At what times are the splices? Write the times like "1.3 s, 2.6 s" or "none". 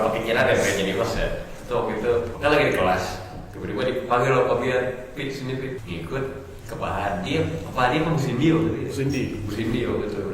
2.3 s, 5.8 s